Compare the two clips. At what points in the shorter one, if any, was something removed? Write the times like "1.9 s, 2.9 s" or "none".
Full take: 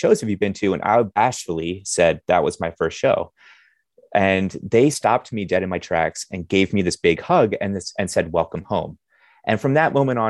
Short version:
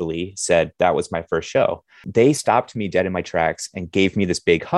2.0 s

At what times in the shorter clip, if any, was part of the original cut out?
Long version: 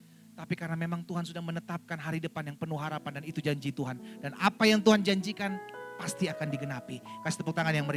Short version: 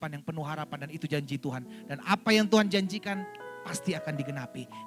none

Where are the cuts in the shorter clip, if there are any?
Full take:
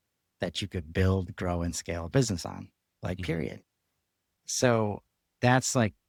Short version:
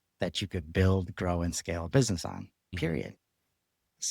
2.7 s

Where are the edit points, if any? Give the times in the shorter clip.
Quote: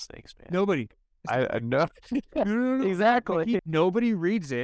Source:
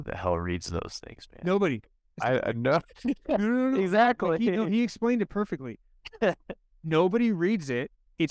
3.6 s

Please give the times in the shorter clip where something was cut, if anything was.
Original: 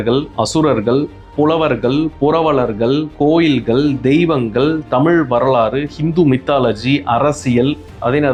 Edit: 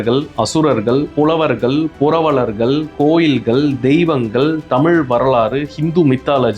1.1 s

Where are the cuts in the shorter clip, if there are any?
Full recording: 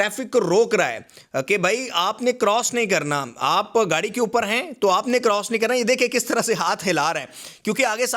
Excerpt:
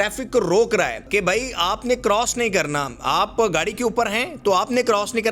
1.1 s

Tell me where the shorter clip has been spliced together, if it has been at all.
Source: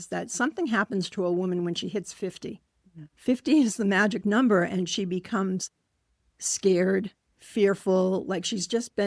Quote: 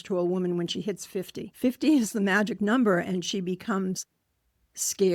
1.4 s

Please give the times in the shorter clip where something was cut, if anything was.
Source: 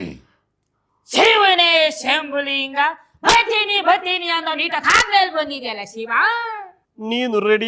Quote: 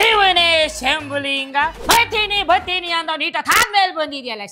1.8 s

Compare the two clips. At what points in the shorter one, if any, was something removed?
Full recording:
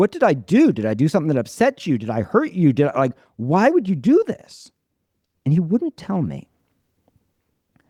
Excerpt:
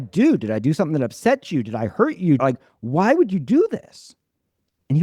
2.4 s

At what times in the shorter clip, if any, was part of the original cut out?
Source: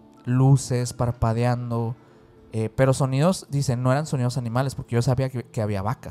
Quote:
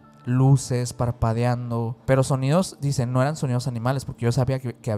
2.0 s

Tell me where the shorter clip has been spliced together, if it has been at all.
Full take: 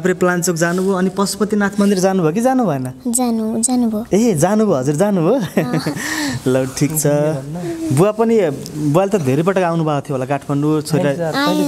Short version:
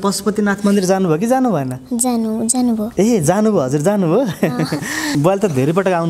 5.1 s

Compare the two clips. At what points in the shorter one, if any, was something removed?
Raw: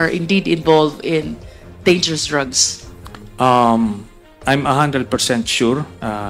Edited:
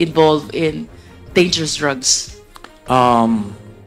none

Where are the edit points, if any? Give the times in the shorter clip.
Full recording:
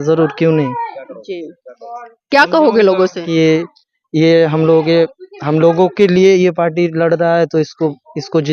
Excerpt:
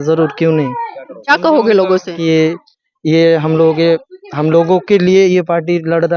1.3 s

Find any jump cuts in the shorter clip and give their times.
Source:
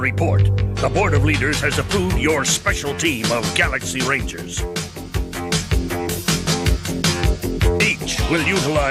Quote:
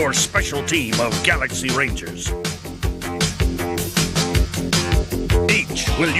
none

